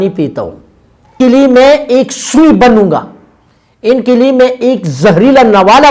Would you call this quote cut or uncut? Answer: cut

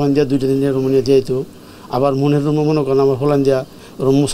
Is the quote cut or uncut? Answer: uncut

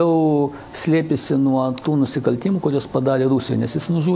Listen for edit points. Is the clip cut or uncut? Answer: uncut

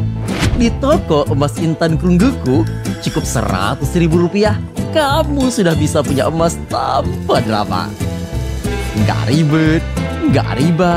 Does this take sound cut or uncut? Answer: uncut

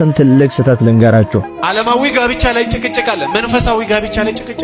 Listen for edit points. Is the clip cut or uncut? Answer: cut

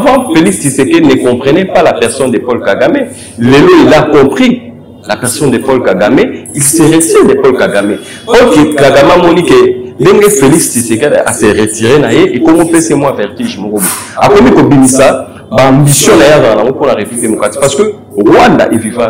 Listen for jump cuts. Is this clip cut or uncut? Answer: uncut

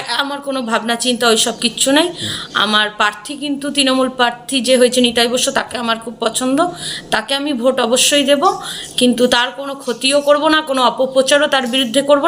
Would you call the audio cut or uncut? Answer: uncut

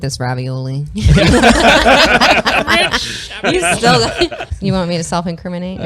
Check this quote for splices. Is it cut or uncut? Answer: cut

